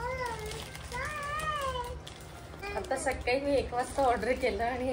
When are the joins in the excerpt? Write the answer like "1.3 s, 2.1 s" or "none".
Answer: 2.6 s